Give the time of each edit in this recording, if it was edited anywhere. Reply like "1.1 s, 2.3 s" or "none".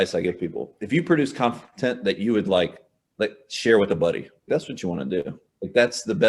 none